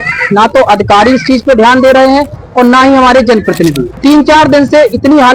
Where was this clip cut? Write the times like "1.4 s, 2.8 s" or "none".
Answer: 3.9 s